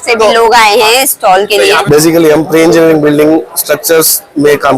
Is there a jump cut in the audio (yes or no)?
yes